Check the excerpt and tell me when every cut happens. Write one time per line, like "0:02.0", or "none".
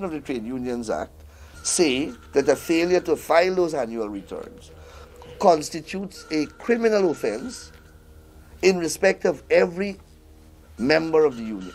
none